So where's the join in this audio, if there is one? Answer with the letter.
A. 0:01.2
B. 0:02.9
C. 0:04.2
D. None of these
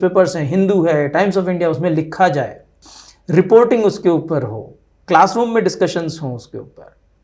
D